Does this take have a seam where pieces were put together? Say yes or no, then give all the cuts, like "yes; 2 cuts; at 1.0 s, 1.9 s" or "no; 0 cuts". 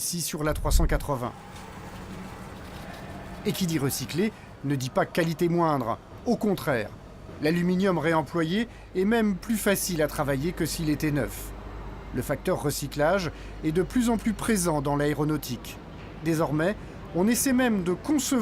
yes; 1 cut; at 7.3 s